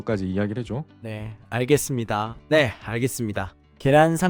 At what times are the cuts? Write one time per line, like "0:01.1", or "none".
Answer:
none

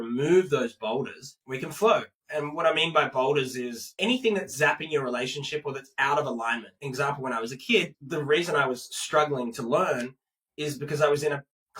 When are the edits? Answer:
0:03.9
0:06.7
0:08.0

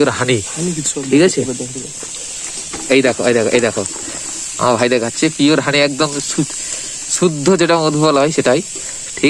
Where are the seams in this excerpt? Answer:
none

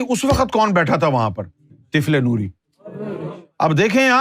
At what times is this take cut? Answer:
0:03.3

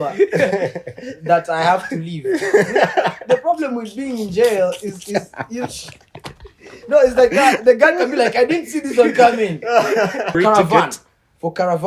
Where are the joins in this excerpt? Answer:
0:10.3

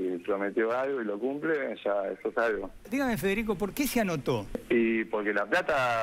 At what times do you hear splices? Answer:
0:02.8
0:04.5

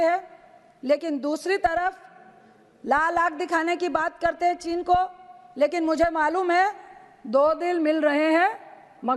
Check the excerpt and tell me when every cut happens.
none

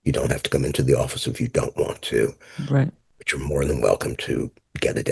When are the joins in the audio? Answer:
none

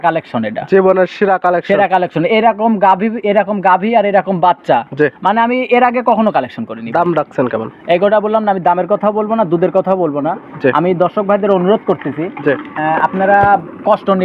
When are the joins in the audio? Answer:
none

